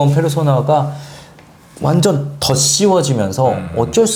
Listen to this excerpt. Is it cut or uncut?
uncut